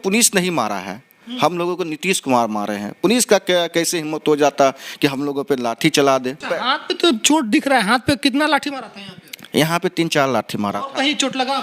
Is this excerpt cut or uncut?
cut